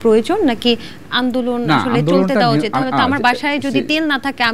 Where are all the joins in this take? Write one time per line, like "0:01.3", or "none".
none